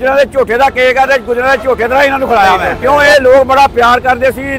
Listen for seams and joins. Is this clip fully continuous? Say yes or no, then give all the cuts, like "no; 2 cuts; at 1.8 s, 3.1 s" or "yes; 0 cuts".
no; 1 cut; at 2.7 s